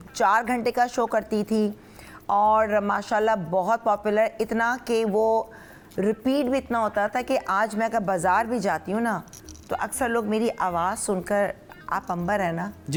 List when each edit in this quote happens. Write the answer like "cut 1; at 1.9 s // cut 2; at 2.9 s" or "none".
none